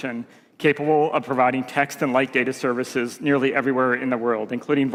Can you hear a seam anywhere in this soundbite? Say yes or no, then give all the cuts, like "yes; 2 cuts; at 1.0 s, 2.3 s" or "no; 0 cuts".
no; 0 cuts